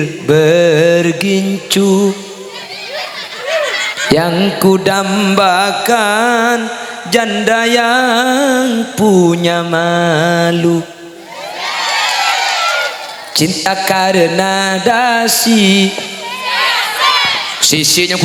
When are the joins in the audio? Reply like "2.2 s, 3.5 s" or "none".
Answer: none